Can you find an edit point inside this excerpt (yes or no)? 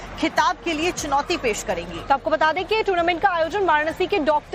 no